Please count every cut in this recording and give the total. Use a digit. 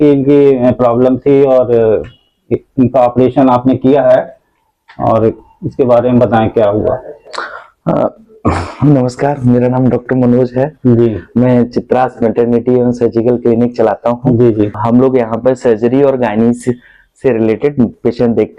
1